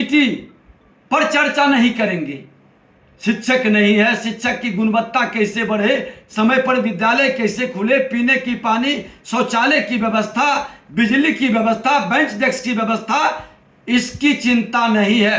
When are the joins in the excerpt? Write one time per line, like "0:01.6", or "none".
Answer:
none